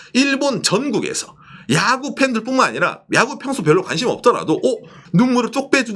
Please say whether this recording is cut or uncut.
cut